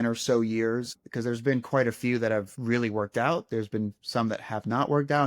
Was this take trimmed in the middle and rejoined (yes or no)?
yes